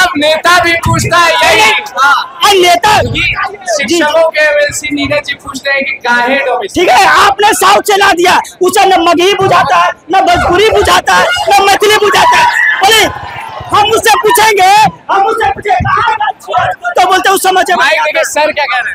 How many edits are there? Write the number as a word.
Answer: zero